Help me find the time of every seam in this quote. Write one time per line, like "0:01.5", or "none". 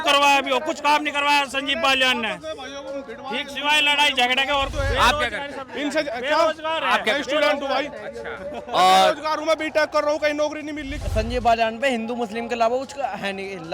0:04.7
0:10.9